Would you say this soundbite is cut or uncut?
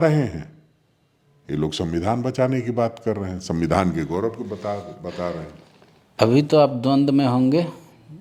uncut